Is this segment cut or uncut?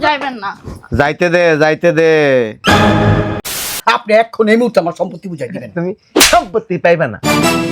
cut